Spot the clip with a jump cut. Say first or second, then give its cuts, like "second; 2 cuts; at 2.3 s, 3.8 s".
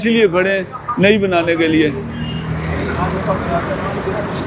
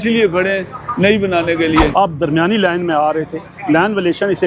second; 1 cut; at 1.9 s